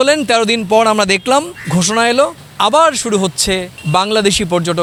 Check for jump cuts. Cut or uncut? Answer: uncut